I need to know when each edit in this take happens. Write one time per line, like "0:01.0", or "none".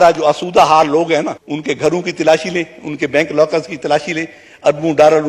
0:01.4

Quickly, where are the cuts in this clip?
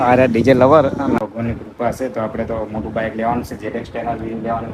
0:01.2

